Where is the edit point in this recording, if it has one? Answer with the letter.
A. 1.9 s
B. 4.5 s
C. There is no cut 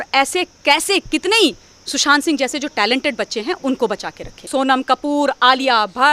B